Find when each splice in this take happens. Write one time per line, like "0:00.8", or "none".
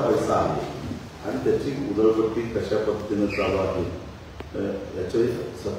none